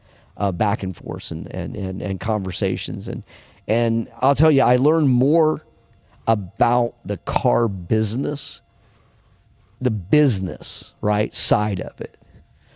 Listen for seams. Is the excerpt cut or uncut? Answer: uncut